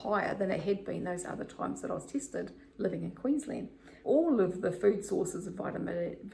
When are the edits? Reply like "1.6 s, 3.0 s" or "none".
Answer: 3.9 s